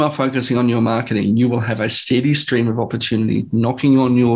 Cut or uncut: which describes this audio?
uncut